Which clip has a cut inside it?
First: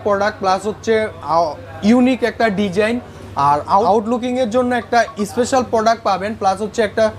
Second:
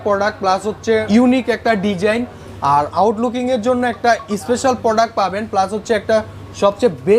second; 2 cuts; at 1.0 s, 3.0 s

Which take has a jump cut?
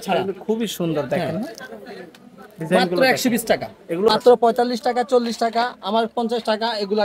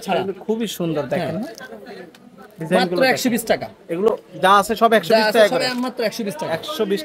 first; 1 cut; at 4.1 s

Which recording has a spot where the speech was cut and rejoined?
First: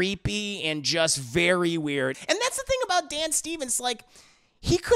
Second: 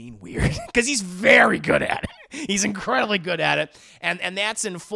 first; 1 cut; at 2.2 s

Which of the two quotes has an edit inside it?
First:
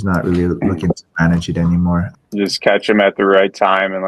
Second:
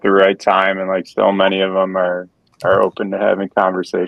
first; 1 cut; at 2.1 s

